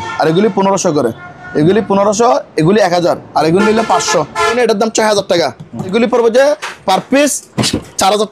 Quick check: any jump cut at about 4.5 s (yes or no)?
yes